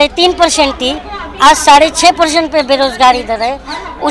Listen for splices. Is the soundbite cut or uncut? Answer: uncut